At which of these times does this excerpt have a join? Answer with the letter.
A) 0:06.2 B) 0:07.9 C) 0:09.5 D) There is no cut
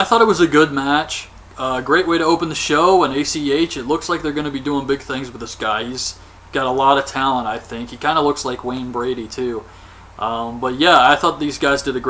D